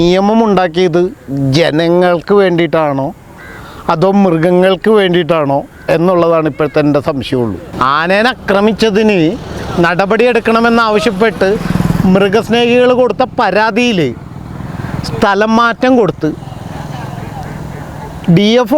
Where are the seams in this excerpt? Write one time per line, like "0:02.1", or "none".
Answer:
0:07.7